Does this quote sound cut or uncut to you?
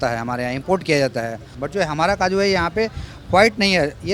cut